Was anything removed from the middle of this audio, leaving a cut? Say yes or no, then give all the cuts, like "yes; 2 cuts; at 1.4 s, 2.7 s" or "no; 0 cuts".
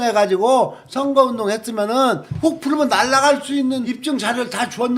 yes; 2 cuts; at 2.3 s, 3.9 s